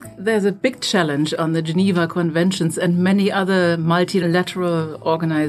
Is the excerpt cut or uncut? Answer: cut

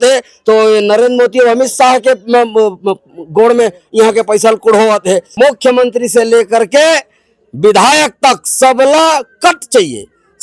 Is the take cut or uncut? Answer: cut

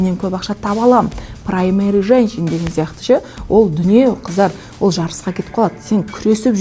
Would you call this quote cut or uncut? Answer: uncut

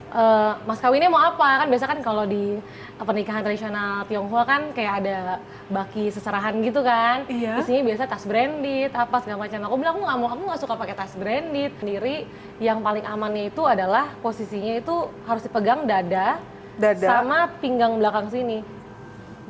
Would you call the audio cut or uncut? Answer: cut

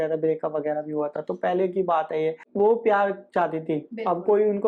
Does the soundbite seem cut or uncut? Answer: uncut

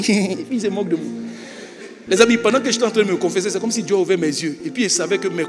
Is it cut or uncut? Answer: uncut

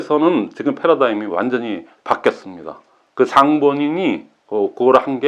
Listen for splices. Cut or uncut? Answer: uncut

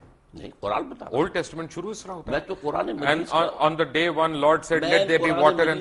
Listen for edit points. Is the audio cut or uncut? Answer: uncut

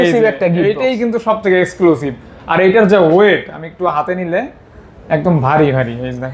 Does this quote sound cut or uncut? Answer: uncut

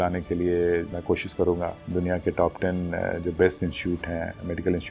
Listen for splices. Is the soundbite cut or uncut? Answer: uncut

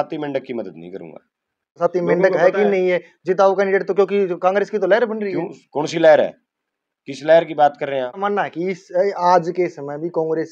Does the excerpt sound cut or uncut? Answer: cut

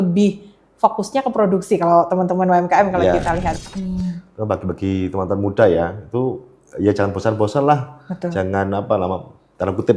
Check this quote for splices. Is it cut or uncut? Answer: cut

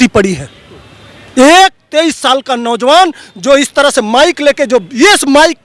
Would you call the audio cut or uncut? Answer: uncut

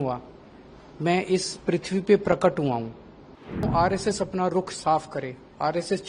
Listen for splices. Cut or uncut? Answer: cut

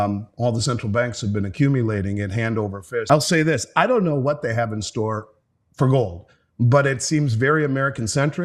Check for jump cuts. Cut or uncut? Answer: cut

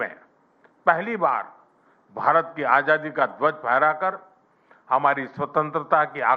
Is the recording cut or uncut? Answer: uncut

